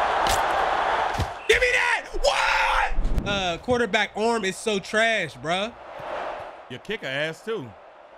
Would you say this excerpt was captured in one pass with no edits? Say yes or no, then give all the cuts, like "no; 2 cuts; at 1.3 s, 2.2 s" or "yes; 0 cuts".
no; 1 cut; at 3.1 s